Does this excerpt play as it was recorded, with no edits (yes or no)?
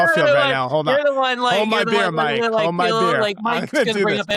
yes